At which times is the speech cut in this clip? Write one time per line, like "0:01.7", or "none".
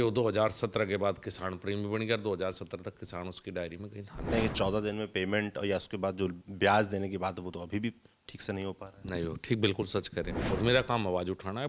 0:04.3
0:10.4